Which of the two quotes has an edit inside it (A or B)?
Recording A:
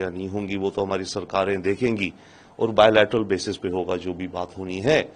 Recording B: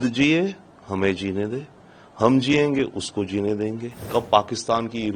B